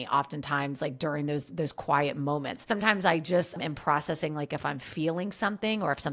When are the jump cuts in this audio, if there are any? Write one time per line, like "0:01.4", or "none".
none